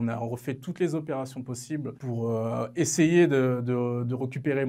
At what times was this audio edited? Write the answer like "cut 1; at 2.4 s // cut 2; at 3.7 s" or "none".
none